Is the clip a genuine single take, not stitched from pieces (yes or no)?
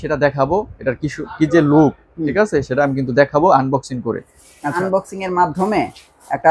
no